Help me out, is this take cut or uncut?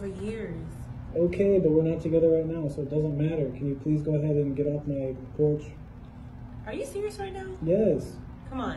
cut